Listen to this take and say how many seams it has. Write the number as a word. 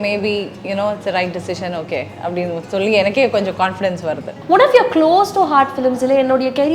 one